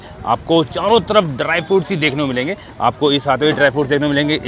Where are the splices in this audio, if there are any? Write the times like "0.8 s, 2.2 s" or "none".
none